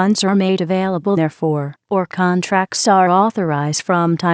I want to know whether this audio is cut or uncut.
uncut